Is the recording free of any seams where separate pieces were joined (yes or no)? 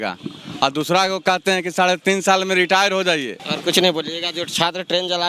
no